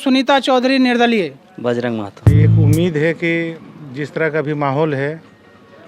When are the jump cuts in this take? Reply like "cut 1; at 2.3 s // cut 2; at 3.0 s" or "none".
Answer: cut 1; at 2.3 s